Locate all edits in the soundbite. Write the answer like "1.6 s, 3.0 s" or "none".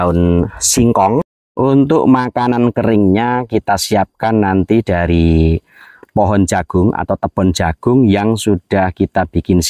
1.3 s